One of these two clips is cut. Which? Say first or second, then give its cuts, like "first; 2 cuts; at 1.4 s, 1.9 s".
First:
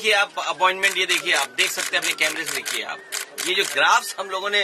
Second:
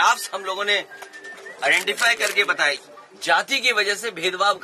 second; 1 cut; at 2.8 s